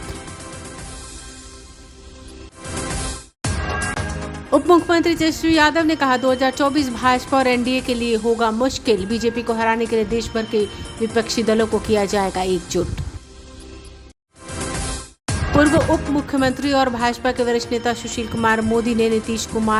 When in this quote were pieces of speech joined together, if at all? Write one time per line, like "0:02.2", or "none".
none